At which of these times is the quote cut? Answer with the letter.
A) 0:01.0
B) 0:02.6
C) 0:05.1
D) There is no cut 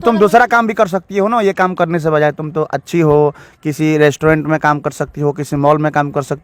D